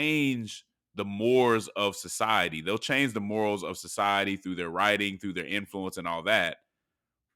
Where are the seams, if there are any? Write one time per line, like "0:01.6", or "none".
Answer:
none